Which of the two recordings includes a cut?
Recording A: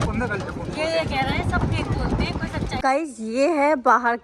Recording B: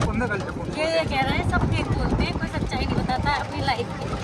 A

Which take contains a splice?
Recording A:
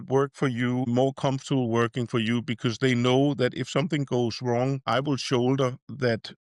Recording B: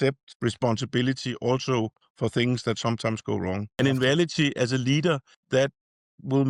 B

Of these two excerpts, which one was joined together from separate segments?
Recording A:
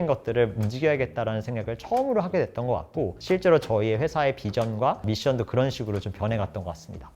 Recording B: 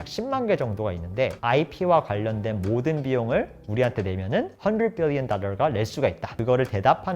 B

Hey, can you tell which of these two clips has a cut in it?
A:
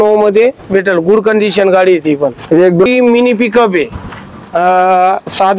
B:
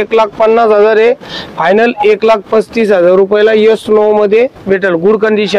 A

